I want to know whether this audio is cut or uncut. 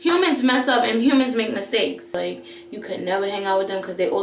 cut